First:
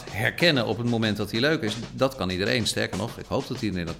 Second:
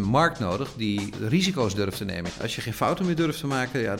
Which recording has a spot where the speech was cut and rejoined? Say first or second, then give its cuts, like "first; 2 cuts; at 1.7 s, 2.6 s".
second; 2 cuts; at 1.1 s, 2.3 s